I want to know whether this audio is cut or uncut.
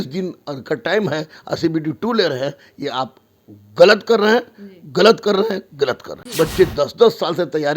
cut